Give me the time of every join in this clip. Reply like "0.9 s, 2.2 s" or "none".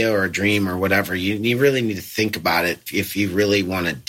2.8 s